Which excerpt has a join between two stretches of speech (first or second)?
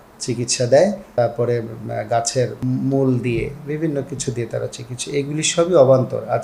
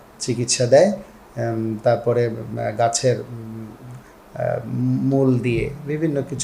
first